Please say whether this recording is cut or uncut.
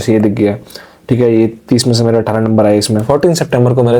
cut